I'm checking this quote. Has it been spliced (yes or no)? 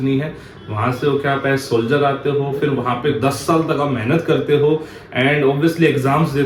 no